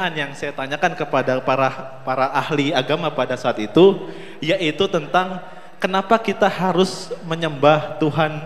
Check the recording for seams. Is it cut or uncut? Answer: uncut